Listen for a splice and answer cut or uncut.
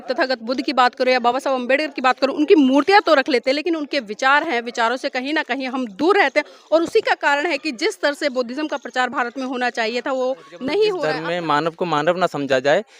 cut